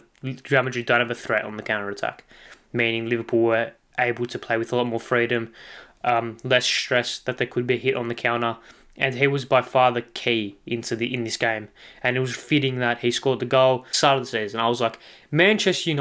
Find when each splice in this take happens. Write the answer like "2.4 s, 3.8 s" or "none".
13.9 s